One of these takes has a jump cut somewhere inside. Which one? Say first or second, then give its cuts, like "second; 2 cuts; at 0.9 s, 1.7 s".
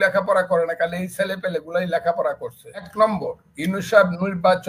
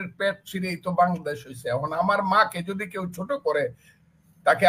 first; 1 cut; at 2.9 s